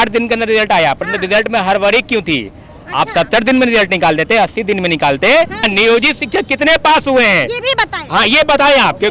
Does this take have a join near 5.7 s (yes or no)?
yes